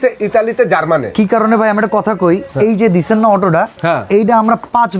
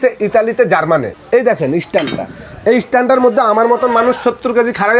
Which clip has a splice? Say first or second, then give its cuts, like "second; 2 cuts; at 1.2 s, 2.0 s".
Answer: second; 1 cut; at 1.1 s